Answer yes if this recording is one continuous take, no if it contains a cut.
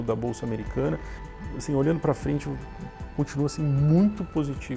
no